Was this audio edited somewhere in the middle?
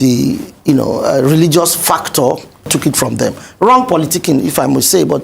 yes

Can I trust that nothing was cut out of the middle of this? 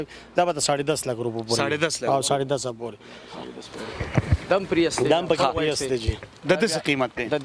yes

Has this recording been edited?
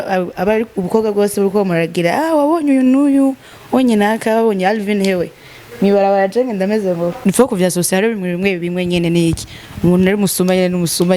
yes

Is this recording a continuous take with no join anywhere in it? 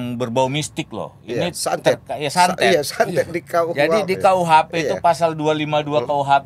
yes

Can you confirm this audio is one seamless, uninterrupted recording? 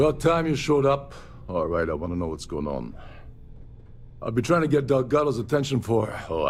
yes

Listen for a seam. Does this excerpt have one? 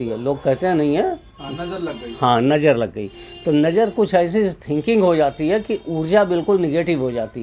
no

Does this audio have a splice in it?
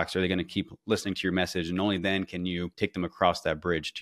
yes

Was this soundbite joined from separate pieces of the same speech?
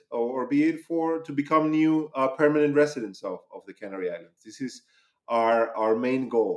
no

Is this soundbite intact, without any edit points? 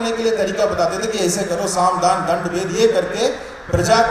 yes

